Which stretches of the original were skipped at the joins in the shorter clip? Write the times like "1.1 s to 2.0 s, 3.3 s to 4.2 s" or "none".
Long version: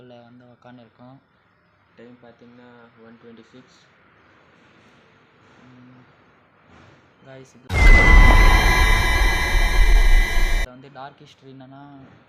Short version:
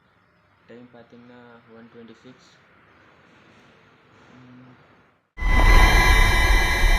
6.9 s to 8.4 s